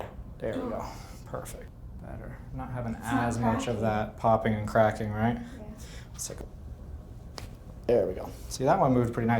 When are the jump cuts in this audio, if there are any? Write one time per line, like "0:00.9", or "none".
0:01.8
0:06.4